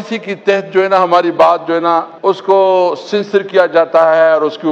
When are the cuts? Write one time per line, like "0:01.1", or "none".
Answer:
0:02.1